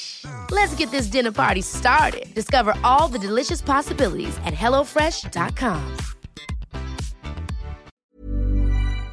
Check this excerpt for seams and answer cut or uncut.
cut